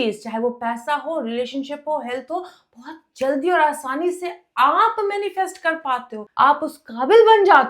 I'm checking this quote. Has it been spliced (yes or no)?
yes